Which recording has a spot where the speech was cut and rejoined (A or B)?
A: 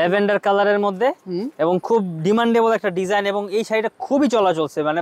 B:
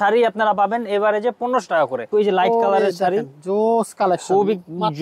B